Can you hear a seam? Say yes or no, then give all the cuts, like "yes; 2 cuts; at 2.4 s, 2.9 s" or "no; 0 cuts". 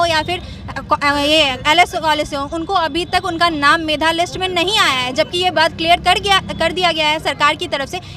no; 0 cuts